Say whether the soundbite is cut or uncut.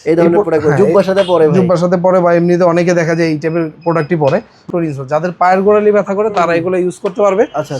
cut